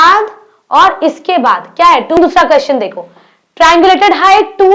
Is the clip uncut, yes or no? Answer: no